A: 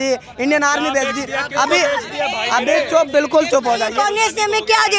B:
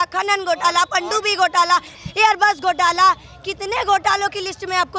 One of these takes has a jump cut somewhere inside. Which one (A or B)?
A